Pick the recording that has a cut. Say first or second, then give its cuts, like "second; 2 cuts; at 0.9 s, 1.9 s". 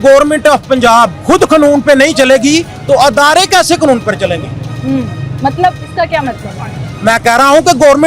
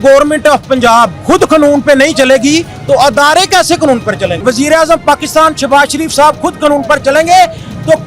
second; 1 cut; at 4.4 s